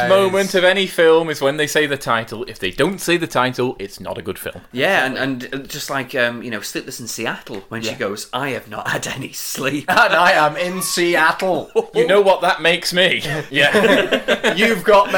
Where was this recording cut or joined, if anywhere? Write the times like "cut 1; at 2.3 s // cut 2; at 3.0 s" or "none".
cut 1; at 4.6 s // cut 2; at 13.4 s